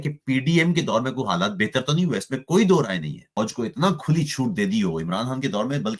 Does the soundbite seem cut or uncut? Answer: cut